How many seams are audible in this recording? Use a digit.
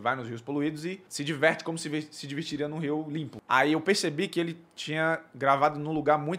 2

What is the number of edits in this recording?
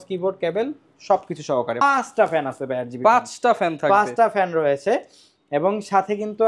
1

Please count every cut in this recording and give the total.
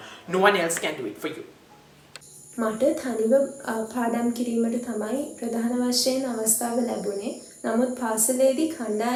0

